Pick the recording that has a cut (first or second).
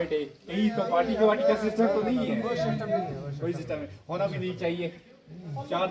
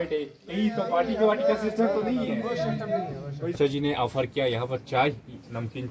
second